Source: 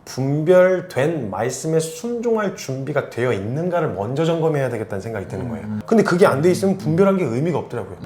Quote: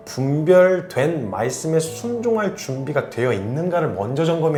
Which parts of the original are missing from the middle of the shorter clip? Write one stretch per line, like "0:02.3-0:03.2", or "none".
none